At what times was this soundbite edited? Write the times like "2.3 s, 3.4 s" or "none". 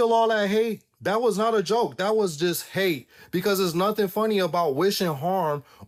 none